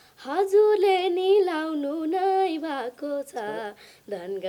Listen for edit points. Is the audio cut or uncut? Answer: uncut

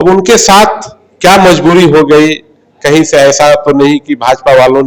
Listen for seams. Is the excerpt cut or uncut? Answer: uncut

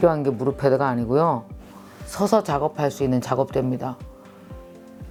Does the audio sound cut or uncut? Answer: uncut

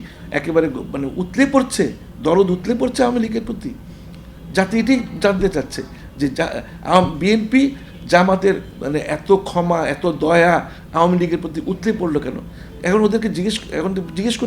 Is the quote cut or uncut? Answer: uncut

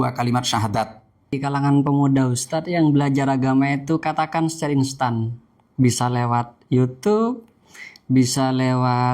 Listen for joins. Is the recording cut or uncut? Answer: cut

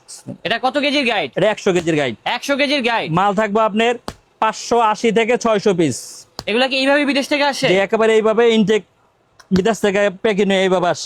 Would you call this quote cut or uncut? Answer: uncut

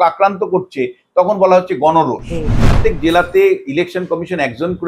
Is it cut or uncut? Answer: cut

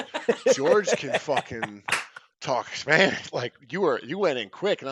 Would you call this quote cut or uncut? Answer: uncut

